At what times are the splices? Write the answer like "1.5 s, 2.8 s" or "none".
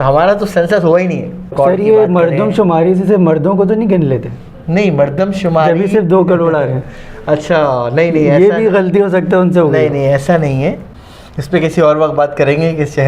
1.5 s, 10.9 s